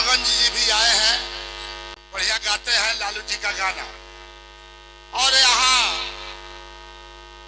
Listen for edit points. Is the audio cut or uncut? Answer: uncut